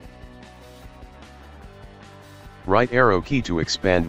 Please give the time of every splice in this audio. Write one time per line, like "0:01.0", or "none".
0:02.6